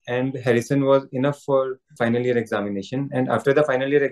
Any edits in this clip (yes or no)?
yes